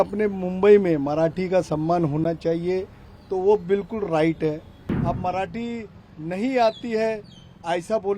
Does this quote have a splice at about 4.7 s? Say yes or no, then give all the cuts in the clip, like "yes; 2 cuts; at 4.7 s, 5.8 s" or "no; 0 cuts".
yes; 1 cut; at 4.7 s